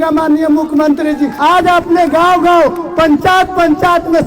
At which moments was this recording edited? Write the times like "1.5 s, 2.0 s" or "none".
1.3 s